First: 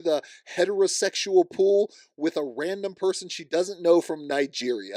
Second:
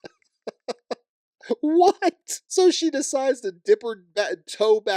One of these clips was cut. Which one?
second; 1 cut; at 2.3 s

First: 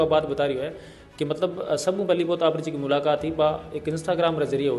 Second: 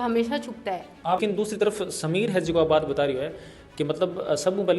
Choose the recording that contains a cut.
second; 1 cut; at 1.2 s

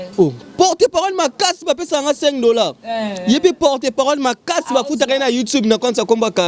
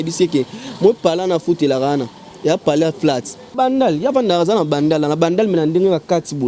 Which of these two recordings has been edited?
second; 1 cut; at 3.5 s

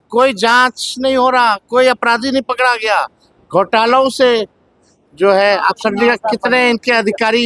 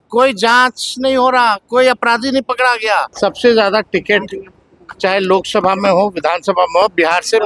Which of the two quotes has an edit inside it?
second; 1 cut; at 3.1 s

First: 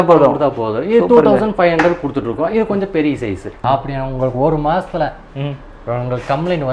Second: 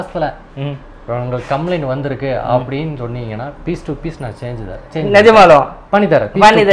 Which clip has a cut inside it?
first; 1 cut; at 3.6 s

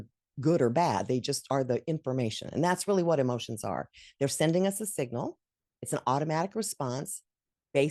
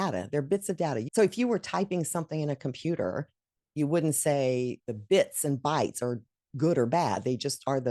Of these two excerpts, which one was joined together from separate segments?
second; 2 cuts; at 1.0 s, 4.9 s

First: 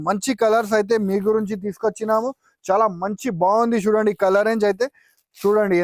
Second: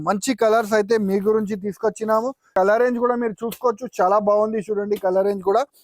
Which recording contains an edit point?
second; 1 cut; at 2.5 s

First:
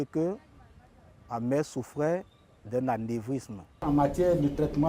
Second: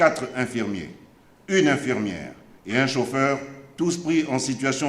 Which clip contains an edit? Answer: first; 1 cut; at 3.8 s

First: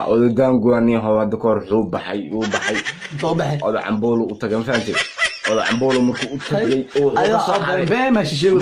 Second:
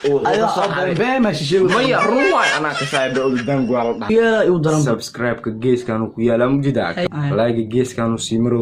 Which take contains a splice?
second; 2 cuts; at 4.1 s, 7.1 s

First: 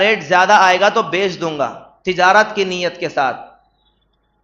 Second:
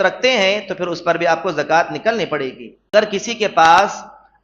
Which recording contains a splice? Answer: second; 1 cut; at 2.9 s

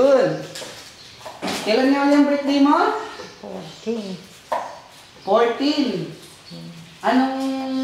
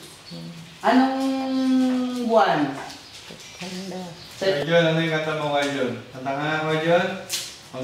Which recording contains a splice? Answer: second; 2 cuts; at 4.6 s, 6.1 s

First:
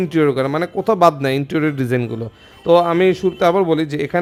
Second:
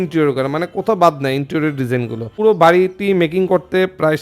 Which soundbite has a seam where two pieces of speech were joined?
second; 1 cut; at 2.3 s

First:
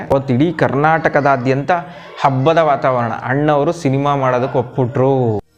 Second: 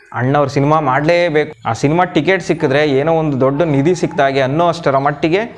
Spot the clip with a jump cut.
second; 1 cut; at 1.5 s

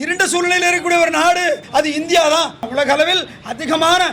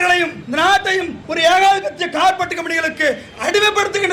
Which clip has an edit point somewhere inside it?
first; 2 cuts; at 1.6 s, 2.7 s

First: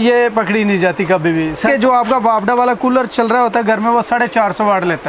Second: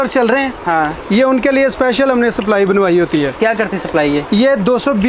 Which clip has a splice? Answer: first; 1 cut; at 1.7 s

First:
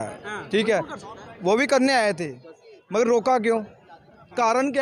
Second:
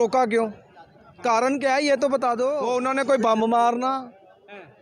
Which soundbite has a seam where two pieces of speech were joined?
second; 1 cut; at 2.6 s

